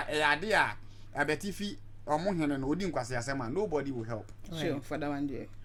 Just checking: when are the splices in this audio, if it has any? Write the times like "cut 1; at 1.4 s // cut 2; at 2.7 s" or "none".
none